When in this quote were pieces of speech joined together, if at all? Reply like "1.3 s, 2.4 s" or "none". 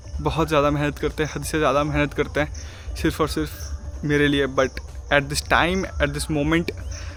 none